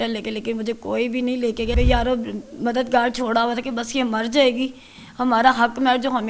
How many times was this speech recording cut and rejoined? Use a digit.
1